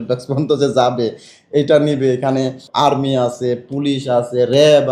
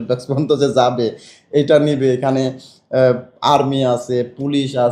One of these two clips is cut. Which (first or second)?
first